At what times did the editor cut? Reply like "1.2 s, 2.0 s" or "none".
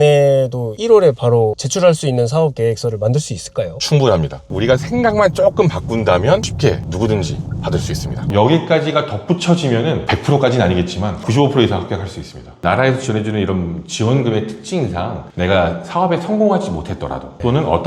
4.5 s, 8.2 s, 12.5 s